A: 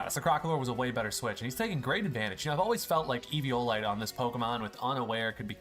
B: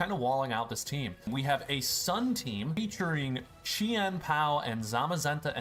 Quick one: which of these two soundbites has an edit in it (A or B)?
B